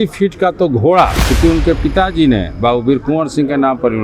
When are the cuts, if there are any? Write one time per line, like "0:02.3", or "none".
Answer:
0:01.3